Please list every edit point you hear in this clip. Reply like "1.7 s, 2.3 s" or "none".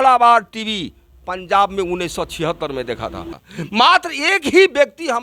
3.3 s

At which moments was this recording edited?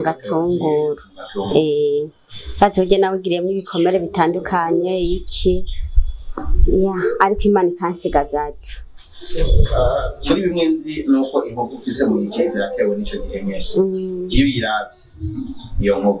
none

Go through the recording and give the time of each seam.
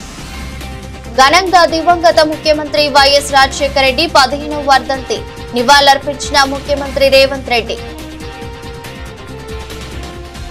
none

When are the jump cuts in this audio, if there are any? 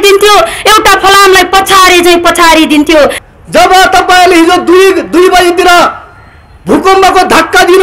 3.2 s

